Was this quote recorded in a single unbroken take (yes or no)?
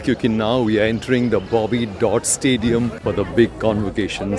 no